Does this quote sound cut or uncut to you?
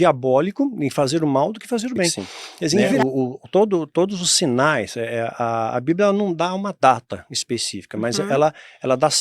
cut